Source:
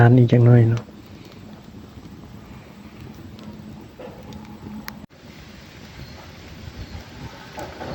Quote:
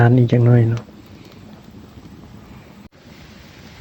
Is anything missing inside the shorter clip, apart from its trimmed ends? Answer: yes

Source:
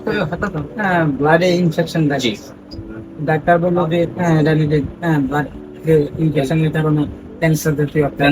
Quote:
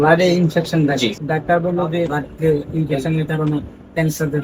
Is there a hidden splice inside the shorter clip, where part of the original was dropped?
yes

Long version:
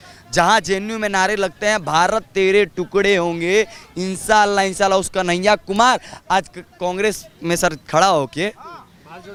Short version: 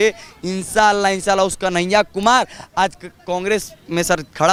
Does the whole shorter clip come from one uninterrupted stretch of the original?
yes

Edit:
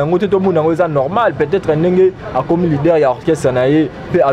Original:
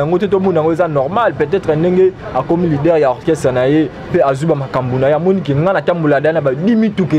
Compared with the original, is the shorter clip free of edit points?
yes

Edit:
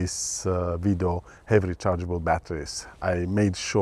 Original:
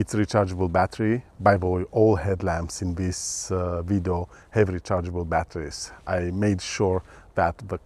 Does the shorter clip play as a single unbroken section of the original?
yes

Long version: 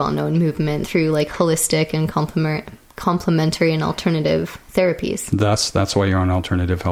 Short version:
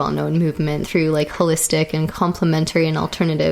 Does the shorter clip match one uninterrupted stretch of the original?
no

